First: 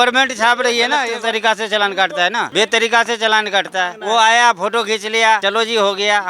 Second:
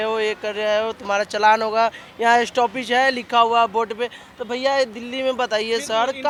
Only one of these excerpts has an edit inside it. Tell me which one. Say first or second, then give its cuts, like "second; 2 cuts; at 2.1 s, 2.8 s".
first; 4 cuts; at 1.1 s, 2.5 s, 4.0 s, 5.4 s